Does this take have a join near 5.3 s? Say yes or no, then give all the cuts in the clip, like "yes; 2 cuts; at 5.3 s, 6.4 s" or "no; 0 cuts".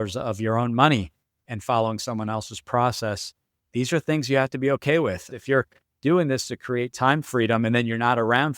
yes; 1 cut; at 5.3 s